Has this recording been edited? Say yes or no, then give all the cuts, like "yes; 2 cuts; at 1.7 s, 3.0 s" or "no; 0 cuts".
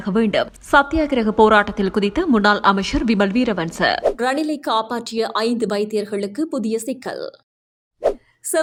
no; 0 cuts